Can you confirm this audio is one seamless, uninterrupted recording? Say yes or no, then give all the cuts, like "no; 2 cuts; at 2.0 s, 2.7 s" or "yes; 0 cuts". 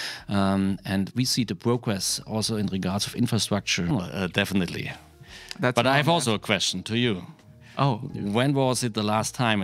no; 1 cut; at 4.0 s